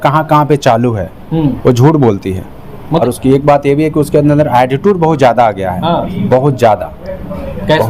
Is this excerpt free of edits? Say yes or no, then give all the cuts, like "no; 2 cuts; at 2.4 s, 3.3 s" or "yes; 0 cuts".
no; 1 cut; at 3.0 s